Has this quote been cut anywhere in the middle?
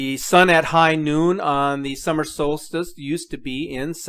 no; 0 cuts

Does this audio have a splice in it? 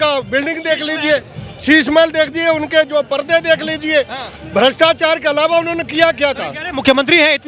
no; 0 cuts

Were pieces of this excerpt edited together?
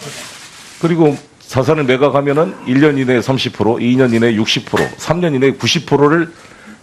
yes; 1 cut; at 1.5 s

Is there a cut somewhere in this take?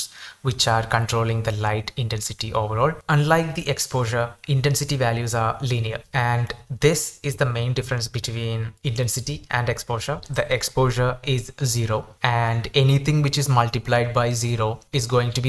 yes; 2 cuts; at 3.0 s, 10.3 s

